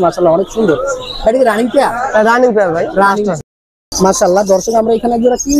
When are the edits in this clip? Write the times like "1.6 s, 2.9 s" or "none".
3.4 s